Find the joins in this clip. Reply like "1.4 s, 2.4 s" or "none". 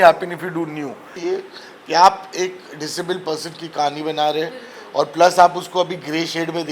1.1 s